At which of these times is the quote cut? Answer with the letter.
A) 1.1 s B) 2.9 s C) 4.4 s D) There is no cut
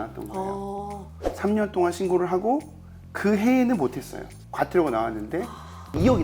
C